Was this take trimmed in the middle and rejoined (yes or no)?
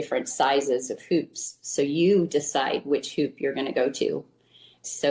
no